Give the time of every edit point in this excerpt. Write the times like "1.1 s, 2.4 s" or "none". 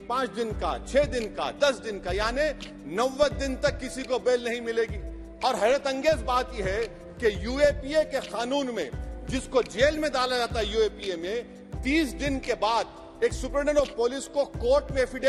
none